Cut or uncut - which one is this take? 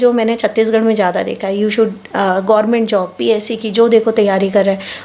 uncut